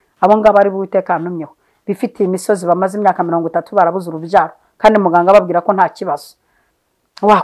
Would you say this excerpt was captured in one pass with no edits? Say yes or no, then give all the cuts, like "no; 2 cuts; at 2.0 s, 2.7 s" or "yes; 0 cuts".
yes; 0 cuts